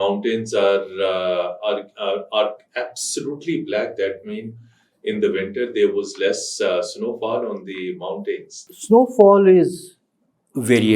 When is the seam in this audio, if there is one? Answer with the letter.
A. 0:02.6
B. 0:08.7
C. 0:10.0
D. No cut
B